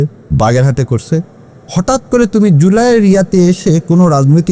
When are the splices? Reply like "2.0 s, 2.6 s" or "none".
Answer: none

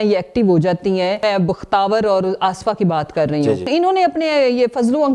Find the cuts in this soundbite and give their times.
1.2 s, 3.7 s

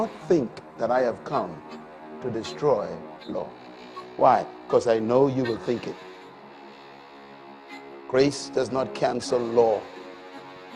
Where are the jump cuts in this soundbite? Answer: 6.0 s, 7.5 s

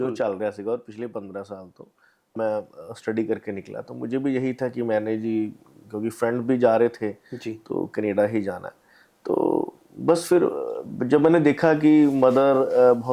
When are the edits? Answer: 2.3 s

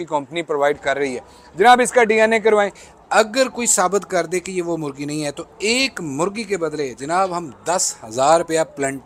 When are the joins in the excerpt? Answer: none

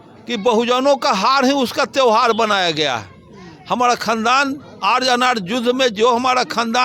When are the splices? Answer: none

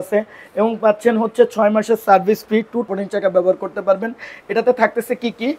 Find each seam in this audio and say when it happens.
2.9 s

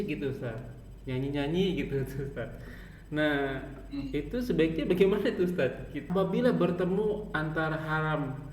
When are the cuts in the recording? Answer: 6.1 s

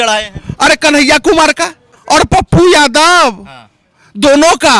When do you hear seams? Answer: 2.3 s

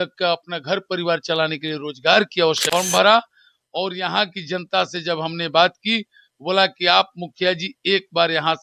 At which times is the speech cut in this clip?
2.6 s

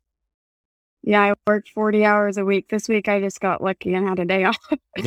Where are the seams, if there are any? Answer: none

